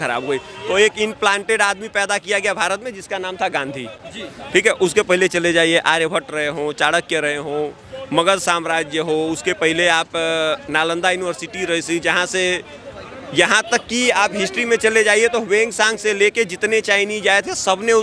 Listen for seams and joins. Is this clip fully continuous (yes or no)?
yes